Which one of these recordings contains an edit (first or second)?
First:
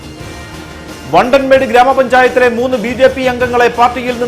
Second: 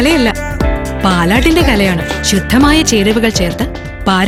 first